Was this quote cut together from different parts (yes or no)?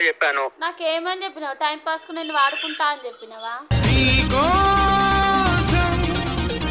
no